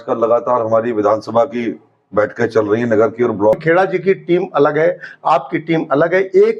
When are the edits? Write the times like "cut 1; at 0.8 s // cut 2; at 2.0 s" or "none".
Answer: cut 1; at 3.6 s